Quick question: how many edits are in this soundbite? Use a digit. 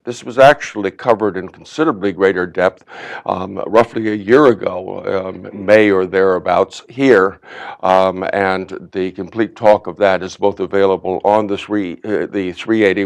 1